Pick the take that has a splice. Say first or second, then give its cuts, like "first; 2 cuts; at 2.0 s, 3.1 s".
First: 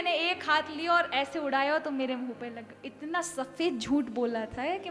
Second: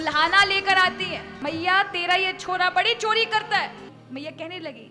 second; 2 cuts; at 1.4 s, 3.9 s